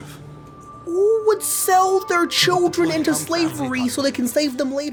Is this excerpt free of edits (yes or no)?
yes